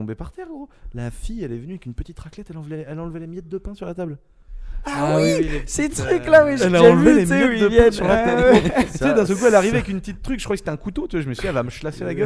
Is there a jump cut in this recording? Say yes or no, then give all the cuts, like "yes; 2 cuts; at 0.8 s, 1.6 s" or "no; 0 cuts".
no; 0 cuts